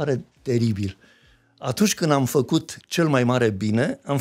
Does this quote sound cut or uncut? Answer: uncut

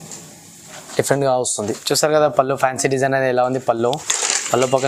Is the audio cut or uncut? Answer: cut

